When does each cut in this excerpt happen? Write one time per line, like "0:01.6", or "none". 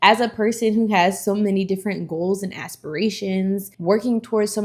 none

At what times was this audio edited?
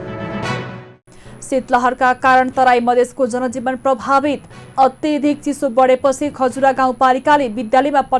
0:00.9

